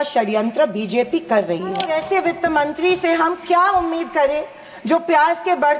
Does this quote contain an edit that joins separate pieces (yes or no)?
yes